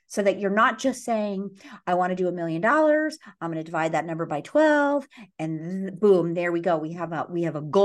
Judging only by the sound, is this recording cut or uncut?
uncut